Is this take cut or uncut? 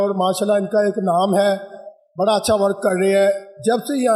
uncut